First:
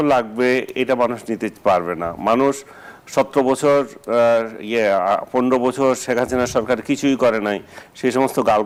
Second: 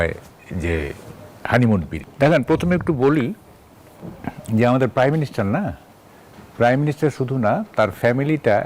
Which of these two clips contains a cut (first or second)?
second